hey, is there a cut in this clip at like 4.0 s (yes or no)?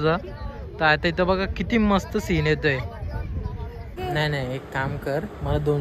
yes